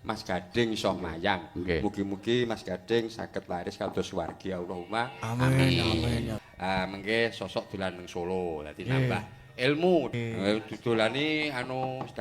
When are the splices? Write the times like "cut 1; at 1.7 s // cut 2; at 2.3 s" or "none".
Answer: cut 1; at 6.3 s // cut 2; at 10.1 s